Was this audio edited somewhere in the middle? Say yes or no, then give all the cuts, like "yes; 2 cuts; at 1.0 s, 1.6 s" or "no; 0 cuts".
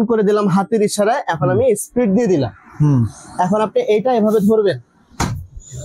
no; 0 cuts